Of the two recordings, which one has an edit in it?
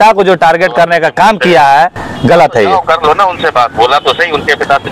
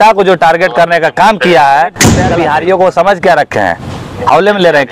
second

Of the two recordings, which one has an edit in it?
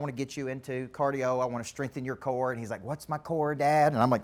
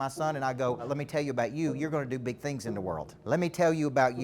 second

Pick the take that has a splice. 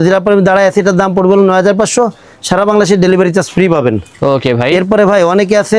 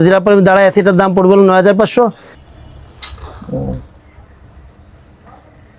second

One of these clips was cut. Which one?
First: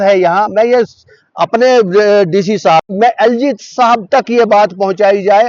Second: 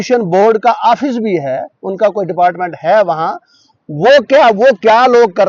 first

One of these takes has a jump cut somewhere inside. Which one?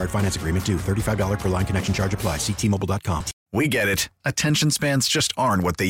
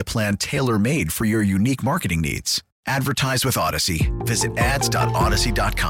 first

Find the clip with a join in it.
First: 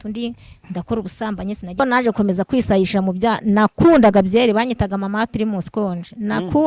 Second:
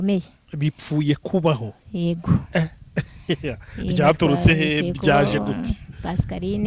first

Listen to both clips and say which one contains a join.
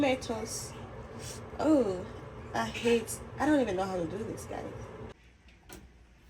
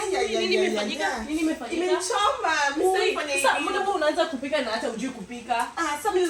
first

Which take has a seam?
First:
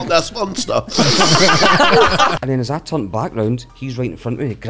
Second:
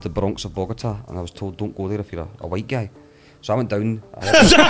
first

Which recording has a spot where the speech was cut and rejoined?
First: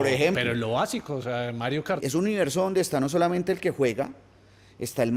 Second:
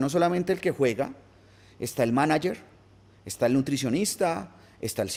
first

